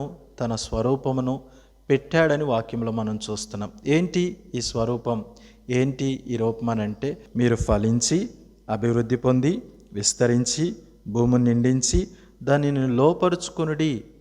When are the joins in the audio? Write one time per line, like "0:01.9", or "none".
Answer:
0:07.2